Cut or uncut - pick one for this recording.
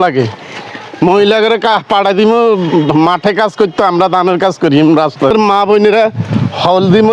cut